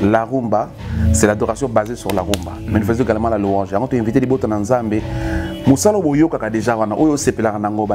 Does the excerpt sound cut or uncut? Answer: cut